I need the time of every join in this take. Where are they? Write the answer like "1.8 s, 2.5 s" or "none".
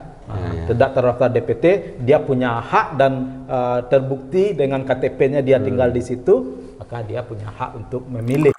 none